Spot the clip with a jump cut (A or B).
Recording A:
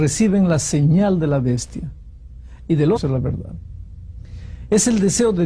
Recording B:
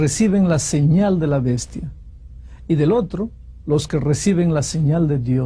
B